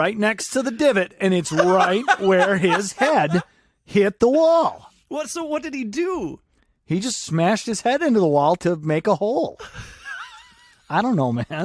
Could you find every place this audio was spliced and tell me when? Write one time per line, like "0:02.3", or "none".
0:08.6